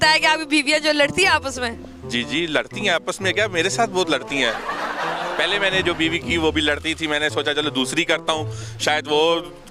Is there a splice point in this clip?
no; 0 cuts

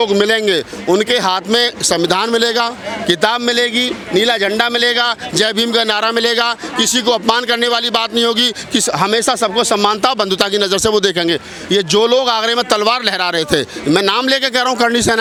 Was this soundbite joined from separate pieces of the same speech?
no; 0 cuts

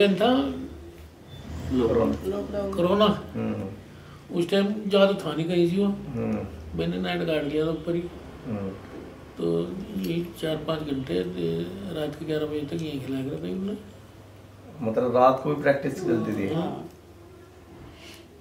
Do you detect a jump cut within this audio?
no; 0 cuts

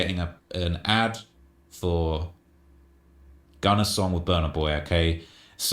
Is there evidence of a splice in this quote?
yes; 1 cut; at 1.0 s

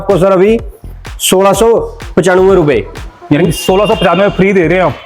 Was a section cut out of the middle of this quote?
no; 0 cuts

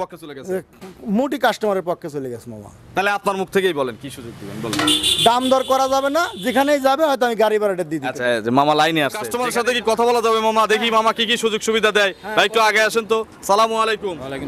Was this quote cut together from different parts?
yes; 1 cut; at 9.4 s

